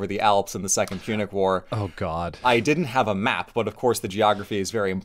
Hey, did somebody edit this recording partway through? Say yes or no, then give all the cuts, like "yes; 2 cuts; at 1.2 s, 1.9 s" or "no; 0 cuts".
yes; 1 cut; at 2.4 s